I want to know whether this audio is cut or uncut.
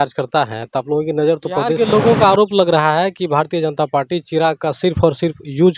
cut